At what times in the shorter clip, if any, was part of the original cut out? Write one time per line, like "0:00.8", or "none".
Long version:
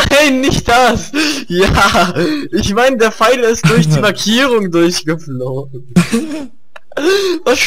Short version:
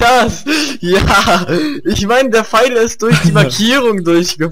none